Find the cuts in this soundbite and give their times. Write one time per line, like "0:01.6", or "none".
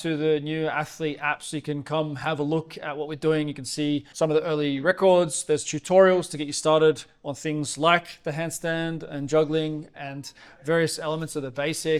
none